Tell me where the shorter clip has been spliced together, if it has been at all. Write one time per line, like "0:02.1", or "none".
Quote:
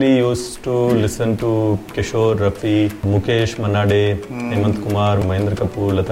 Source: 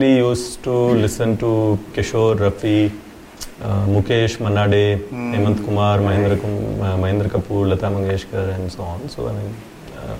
0:03.0
0:05.2